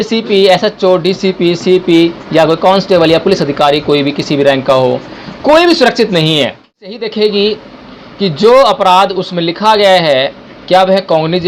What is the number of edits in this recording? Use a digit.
1